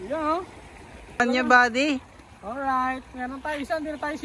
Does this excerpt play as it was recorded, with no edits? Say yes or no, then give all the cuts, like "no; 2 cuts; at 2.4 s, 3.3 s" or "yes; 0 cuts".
no; 1 cut; at 1.2 s